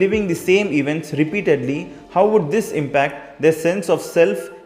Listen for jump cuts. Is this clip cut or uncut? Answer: uncut